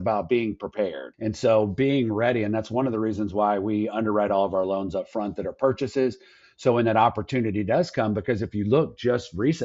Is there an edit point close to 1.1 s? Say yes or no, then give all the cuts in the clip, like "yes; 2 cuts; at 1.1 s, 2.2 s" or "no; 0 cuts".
yes; 1 cut; at 1.1 s